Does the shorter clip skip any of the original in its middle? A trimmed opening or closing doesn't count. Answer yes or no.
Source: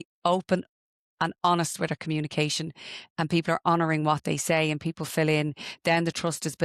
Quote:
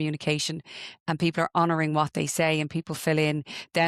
no